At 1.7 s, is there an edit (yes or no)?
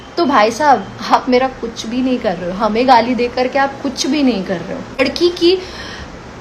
no